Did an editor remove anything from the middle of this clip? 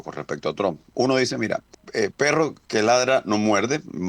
yes; 1 cut; at 1.8 s

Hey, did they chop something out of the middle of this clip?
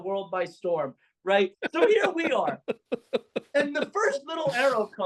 yes; 1 cut; at 1.6 s

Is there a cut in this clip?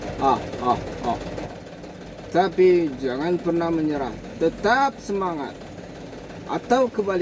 yes; 1 cut; at 1.5 s

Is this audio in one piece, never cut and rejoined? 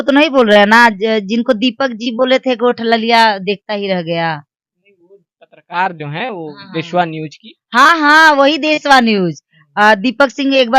yes; 0 cuts

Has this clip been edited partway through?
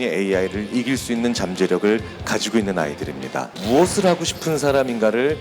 yes; 1 cut; at 3.6 s

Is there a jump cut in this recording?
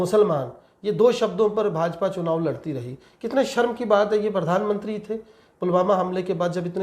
no; 0 cuts

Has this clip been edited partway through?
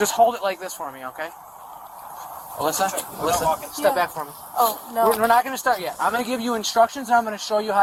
no; 0 cuts

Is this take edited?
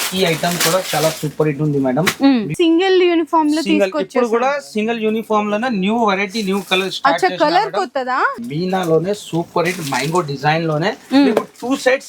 yes; 2 cuts; at 2.5 s, 8.4 s

